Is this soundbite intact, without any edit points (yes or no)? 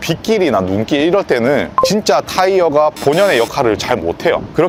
yes